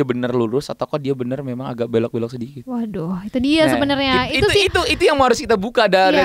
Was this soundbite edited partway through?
no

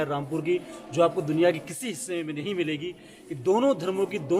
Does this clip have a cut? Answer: yes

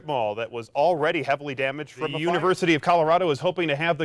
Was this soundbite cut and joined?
yes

